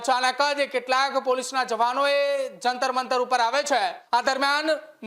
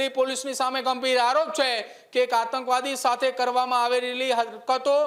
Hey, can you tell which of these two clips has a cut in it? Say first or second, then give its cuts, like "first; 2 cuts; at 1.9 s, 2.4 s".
first; 1 cut; at 4.0 s